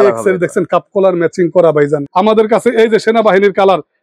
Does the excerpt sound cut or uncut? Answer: cut